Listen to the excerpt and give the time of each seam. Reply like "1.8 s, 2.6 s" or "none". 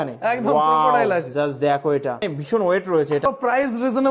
2.2 s, 3.3 s